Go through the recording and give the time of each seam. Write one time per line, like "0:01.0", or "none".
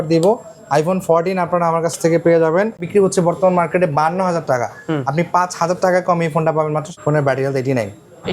0:02.8
0:06.9